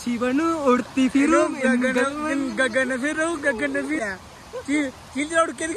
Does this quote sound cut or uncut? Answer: cut